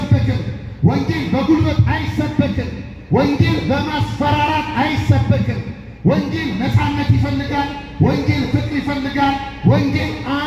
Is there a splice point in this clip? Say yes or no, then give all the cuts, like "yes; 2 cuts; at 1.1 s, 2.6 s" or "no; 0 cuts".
no; 0 cuts